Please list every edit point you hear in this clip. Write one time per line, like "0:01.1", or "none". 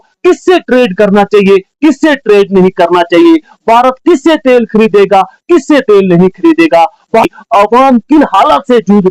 0:07.2